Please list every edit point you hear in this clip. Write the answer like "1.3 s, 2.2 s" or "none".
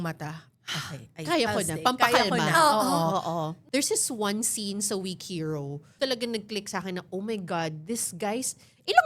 3.6 s, 5.8 s